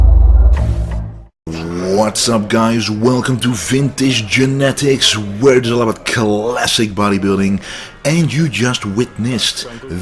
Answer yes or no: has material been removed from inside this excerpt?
no